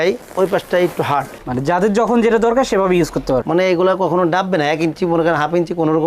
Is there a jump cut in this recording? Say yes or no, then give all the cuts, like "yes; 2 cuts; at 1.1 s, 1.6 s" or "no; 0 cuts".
yes; 1 cut; at 3.4 s